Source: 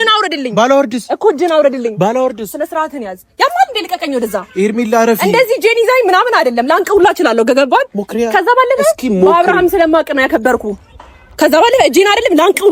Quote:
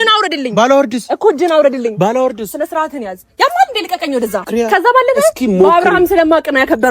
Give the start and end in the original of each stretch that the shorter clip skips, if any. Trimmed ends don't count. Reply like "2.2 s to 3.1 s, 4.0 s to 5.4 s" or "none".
4.4 s to 8.0 s